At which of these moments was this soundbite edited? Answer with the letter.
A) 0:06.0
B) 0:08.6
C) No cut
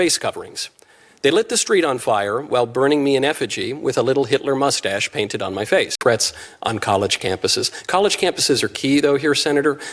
A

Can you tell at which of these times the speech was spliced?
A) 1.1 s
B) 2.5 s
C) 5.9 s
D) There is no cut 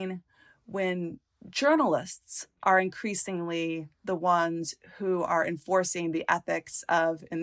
D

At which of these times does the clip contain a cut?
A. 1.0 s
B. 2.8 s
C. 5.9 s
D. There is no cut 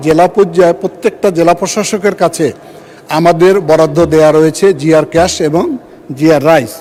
D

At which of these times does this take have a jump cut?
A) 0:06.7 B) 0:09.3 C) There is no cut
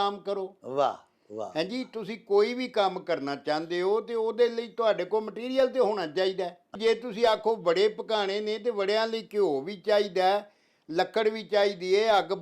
A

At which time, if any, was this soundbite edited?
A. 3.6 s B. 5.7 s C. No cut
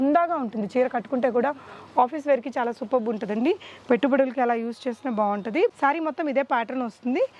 B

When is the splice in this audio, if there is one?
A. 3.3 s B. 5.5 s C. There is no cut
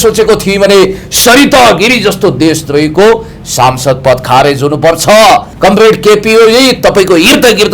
B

